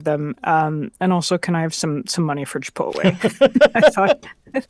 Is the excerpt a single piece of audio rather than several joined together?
yes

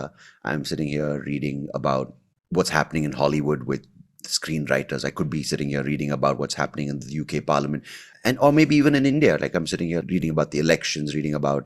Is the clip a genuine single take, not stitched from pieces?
no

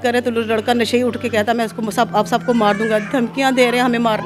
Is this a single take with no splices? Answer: yes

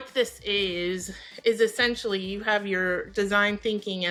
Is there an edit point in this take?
no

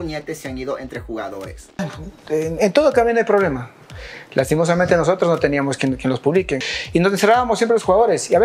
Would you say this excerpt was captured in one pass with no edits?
no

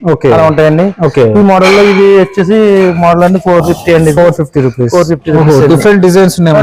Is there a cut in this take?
no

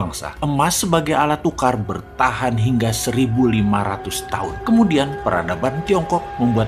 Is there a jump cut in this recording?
no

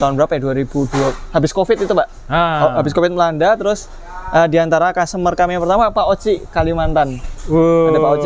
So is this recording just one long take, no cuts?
yes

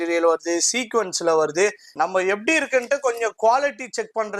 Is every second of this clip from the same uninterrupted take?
no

